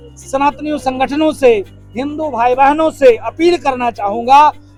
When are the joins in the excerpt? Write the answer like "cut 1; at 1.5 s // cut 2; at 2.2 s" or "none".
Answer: none

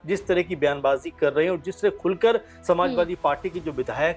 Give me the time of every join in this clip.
none

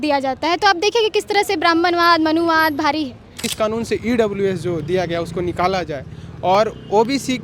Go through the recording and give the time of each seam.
cut 1; at 3.5 s

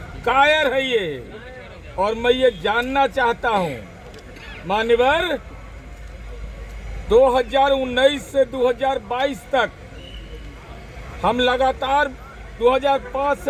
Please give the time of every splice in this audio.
none

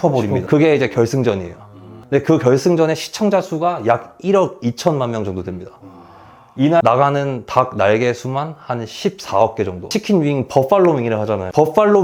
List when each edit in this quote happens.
none

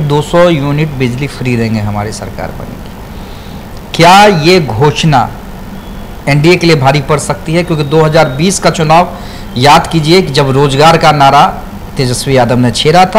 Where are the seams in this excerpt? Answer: none

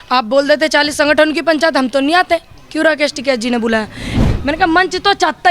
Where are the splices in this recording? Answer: cut 1; at 4.2 s

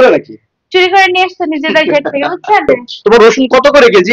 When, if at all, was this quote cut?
cut 1; at 2.7 s

